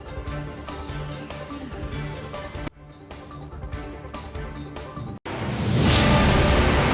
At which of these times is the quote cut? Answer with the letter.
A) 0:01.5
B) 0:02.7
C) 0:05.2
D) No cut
C